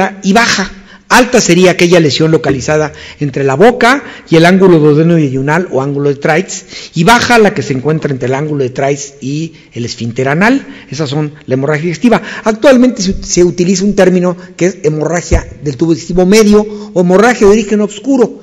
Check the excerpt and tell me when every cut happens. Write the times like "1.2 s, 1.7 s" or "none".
none